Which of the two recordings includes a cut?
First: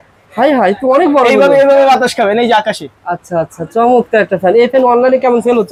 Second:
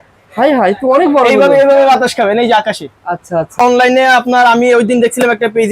second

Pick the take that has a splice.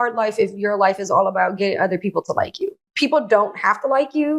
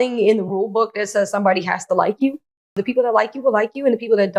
first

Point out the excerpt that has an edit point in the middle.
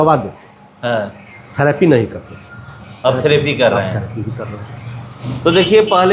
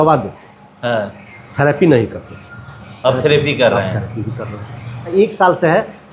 second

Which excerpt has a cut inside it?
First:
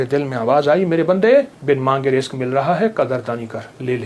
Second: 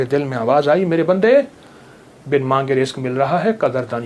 first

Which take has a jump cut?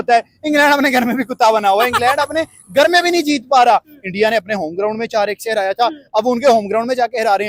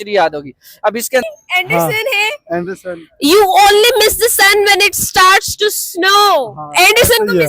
second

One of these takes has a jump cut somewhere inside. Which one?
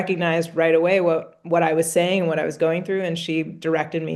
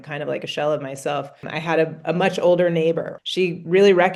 second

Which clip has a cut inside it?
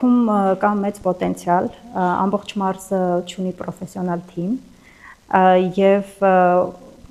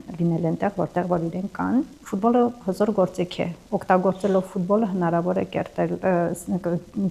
second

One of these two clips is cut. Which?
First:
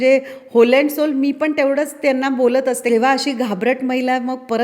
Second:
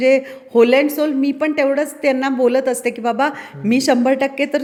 first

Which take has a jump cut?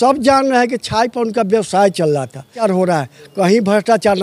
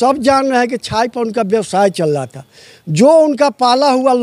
first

